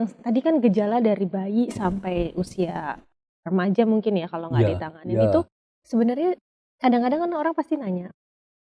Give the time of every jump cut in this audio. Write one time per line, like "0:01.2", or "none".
none